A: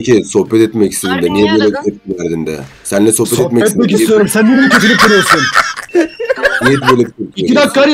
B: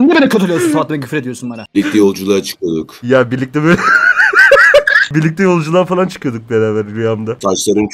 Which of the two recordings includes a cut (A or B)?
B